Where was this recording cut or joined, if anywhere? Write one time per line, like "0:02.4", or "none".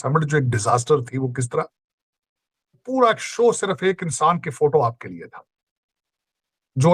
0:02.8

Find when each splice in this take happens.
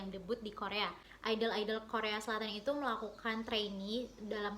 0:01.1

